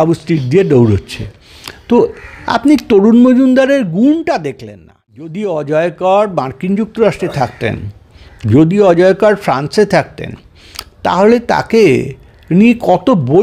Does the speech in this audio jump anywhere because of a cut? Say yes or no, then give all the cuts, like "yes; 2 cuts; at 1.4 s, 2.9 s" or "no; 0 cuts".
yes; 1 cut; at 5.4 s